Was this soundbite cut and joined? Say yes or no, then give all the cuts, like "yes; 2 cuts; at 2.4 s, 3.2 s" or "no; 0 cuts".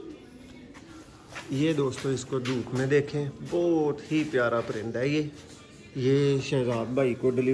no; 0 cuts